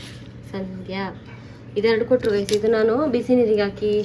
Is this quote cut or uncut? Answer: uncut